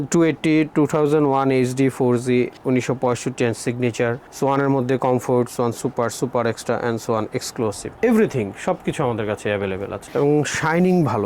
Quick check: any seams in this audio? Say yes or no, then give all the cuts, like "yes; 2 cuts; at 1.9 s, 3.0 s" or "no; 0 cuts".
yes; 1 cut; at 10.0 s